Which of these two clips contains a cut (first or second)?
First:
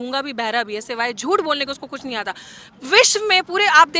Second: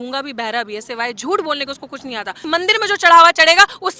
second